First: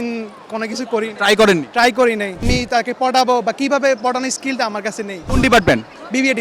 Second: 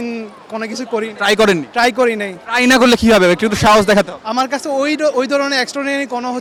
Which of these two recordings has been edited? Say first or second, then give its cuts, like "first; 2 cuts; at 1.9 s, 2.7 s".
first; 2 cuts; at 2.4 s, 5.3 s